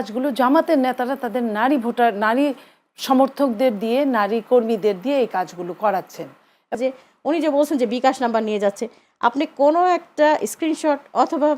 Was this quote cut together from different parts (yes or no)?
yes